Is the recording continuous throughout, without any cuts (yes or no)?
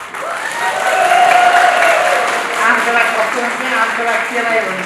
yes